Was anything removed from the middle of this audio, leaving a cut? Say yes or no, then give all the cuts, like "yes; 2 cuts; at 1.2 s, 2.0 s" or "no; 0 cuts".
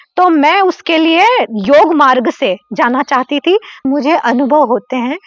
yes; 1 cut; at 3.8 s